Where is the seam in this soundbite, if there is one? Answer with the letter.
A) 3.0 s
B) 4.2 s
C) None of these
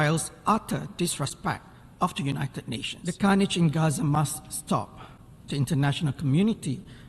A